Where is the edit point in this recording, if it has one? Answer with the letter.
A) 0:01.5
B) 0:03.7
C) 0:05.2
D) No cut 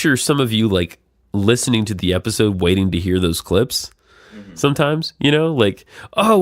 D